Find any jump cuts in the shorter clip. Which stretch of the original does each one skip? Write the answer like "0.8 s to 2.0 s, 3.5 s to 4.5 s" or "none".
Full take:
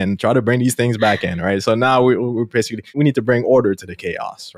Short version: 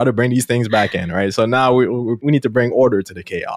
2.4 s to 2.9 s

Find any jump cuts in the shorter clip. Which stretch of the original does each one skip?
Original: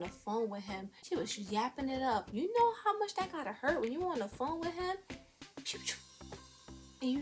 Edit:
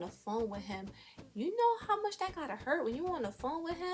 1.3 s to 2.3 s

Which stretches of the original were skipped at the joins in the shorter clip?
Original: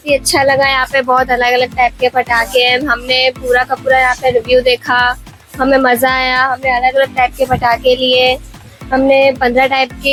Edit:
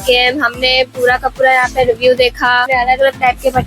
5.1 s to 6.6 s

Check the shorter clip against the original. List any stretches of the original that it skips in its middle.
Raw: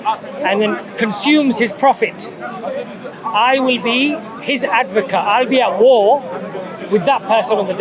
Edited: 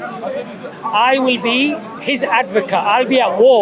none

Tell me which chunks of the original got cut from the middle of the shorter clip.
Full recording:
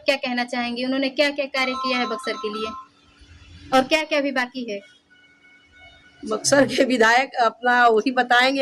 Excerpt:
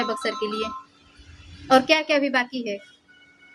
none

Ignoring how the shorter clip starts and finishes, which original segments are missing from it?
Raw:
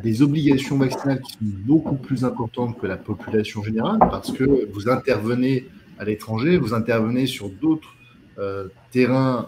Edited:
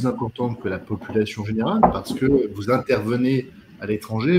none

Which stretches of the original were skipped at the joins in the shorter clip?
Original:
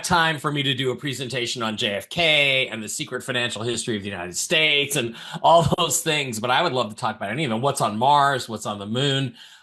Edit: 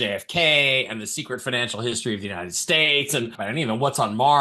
5.2 s to 7.2 s

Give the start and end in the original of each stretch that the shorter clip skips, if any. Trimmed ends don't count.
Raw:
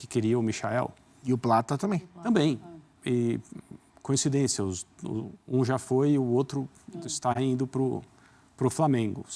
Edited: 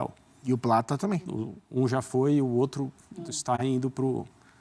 2.1 s to 5.0 s

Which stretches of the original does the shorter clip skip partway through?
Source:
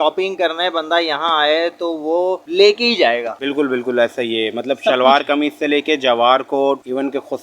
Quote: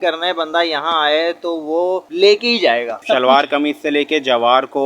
3.4 s to 4.8 s

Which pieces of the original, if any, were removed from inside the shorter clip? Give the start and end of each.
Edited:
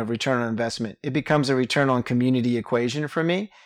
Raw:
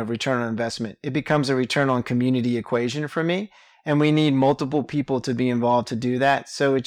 none

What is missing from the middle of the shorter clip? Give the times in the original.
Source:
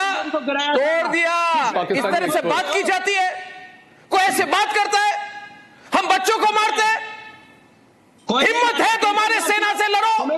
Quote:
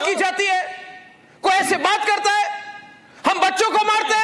none

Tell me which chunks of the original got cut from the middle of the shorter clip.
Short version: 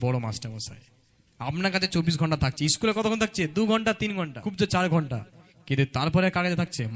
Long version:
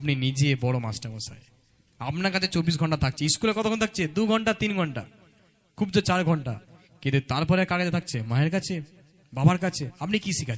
5.0 s to 5.7 s

